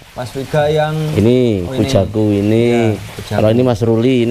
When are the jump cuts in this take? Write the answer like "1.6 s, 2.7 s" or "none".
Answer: none